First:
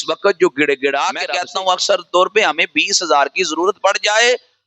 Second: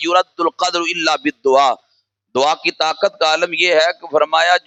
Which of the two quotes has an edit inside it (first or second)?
first